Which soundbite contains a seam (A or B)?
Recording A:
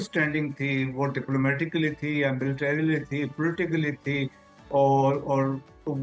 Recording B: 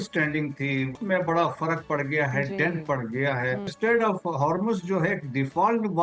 B